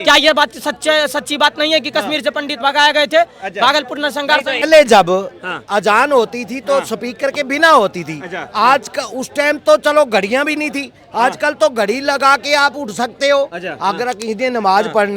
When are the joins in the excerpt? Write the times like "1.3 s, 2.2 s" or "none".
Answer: 4.6 s